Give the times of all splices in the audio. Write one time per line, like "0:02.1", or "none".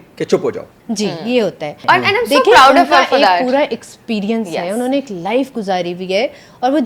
0:01.7